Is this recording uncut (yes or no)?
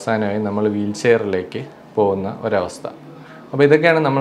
yes